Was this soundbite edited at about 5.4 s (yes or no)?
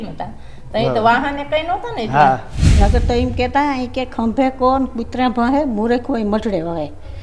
no